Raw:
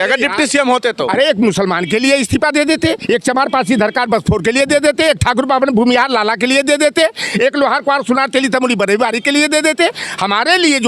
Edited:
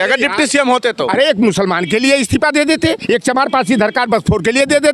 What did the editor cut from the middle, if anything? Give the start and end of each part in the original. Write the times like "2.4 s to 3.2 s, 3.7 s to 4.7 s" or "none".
none